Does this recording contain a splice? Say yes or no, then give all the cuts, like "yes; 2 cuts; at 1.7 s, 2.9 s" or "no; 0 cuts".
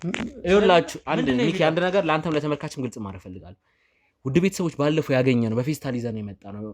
no; 0 cuts